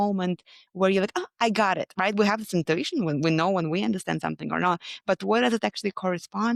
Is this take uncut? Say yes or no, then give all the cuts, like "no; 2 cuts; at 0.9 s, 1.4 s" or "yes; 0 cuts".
yes; 0 cuts